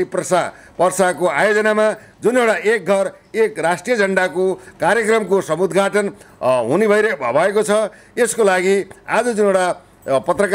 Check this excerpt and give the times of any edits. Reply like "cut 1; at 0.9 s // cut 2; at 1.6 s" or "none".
none